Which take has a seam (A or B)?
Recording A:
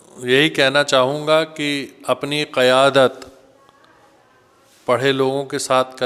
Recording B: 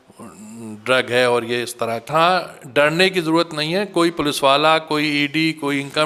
B